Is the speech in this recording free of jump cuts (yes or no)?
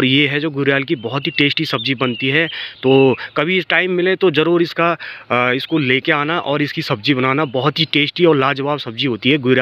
yes